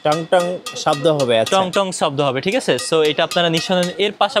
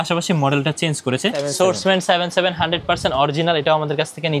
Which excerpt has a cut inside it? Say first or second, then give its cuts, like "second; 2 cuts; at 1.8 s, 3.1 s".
second; 1 cut; at 1.4 s